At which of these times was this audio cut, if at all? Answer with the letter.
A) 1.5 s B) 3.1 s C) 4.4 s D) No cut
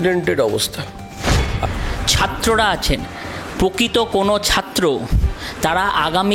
A